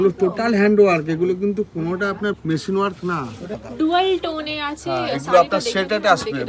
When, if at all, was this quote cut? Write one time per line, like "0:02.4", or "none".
0:02.4
0:03.6

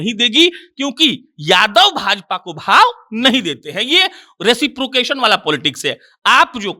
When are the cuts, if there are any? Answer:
none

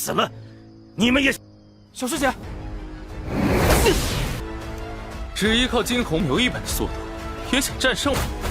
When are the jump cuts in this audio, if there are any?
0:02.5

